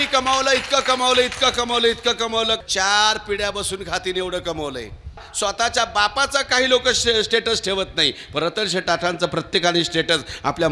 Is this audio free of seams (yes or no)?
no